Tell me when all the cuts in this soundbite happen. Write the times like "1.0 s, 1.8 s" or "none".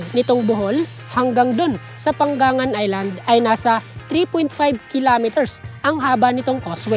none